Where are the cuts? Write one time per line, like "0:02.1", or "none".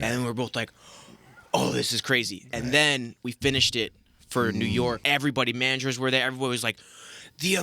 0:05.0